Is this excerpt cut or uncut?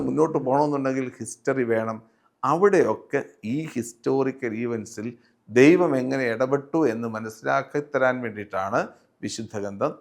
uncut